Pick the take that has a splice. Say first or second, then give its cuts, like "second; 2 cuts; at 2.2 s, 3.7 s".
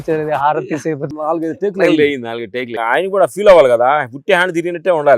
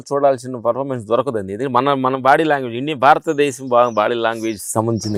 first; 2 cuts; at 1.0 s, 2.7 s